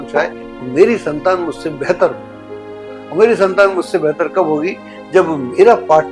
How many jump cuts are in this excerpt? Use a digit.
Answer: 0